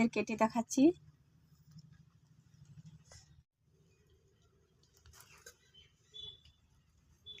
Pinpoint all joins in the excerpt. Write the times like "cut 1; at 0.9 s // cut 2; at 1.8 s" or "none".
none